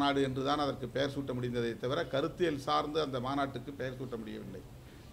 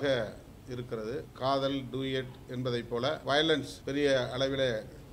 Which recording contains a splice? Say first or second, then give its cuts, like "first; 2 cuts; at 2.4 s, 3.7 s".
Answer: second; 3 cuts; at 1.3 s, 3.2 s, 3.7 s